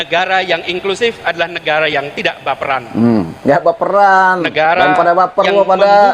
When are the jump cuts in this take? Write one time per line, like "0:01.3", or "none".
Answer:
none